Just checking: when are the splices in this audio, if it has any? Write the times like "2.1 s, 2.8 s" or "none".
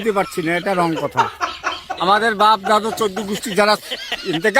1.6 s